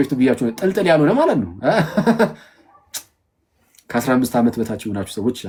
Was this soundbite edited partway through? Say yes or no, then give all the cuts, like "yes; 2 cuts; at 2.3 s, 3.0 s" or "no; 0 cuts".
no; 0 cuts